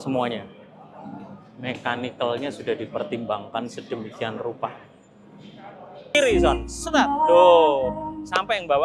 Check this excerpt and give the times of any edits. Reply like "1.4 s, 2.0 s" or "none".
6.0 s